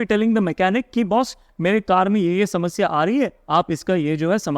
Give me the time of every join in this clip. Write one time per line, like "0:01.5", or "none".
none